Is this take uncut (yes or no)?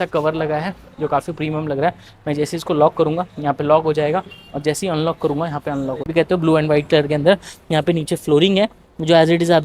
no